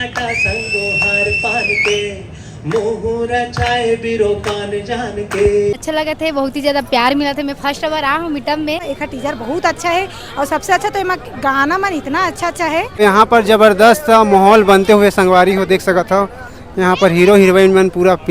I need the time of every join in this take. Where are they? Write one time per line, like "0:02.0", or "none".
0:05.8
0:08.9
0:12.9

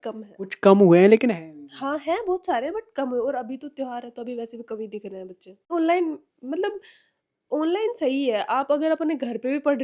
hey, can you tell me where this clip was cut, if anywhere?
0:05.7

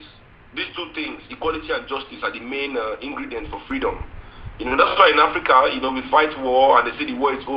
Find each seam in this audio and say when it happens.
none

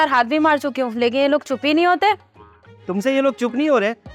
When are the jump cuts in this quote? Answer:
none

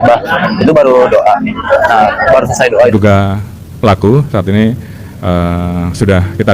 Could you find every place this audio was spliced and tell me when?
0:02.9

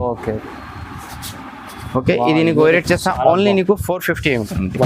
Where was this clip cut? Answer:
none

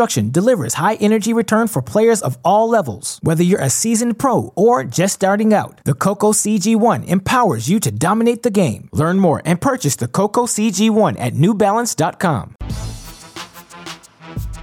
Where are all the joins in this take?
0:12.5

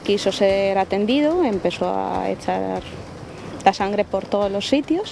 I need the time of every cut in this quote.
none

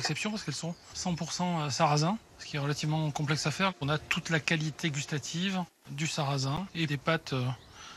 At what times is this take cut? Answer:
0:00.9
0:02.4
0:03.8
0:05.8
0:06.7

